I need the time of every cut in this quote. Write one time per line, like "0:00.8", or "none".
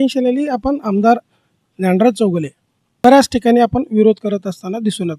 0:03.0